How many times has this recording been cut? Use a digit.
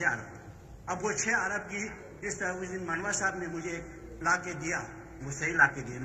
0